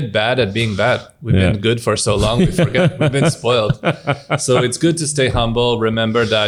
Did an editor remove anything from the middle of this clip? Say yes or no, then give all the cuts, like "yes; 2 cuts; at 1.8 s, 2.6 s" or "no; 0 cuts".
no; 0 cuts